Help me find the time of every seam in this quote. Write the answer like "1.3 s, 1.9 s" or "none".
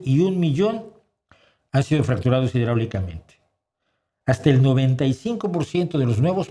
none